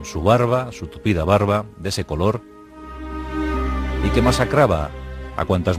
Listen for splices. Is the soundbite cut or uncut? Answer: cut